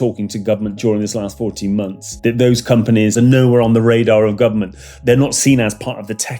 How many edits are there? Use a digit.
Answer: 3